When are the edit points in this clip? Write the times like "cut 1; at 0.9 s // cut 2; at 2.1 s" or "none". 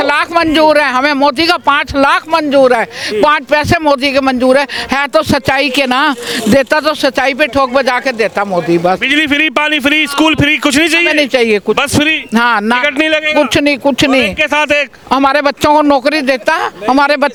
none